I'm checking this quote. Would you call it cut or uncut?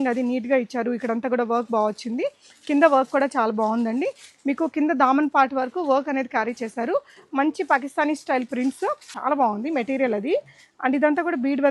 cut